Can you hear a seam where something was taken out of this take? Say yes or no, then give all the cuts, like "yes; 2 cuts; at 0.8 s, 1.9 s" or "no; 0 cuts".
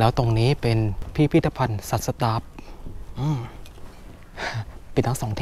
yes; 1 cut; at 1.0 s